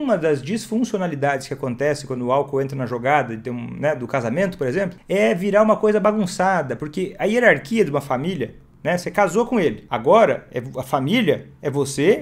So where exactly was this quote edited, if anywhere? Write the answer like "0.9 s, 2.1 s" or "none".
5.0 s, 9.9 s